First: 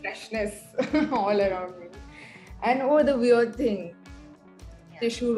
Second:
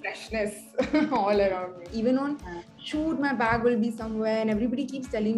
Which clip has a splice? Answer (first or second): second